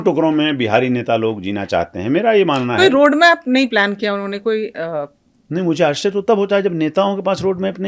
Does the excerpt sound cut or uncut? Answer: uncut